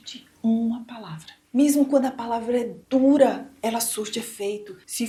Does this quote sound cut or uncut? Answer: uncut